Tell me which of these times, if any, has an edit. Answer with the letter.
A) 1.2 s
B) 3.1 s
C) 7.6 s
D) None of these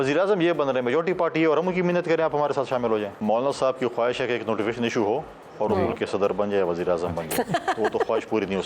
B